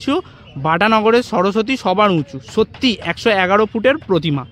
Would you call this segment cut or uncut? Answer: uncut